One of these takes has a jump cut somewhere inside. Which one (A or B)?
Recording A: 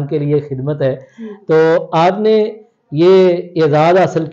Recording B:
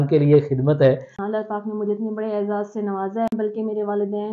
B